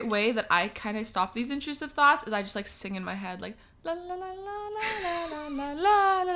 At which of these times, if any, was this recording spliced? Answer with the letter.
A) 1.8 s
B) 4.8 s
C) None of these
C